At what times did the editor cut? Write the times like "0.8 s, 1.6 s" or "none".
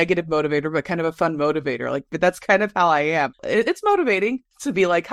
none